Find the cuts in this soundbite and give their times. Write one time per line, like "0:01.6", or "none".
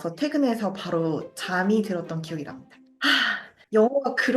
0:03.0